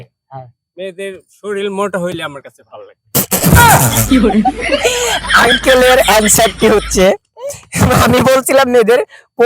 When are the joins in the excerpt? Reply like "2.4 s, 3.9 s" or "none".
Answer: 3.5 s, 4.5 s